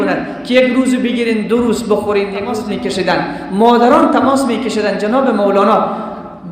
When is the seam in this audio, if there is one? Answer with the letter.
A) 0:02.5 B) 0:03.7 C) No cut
A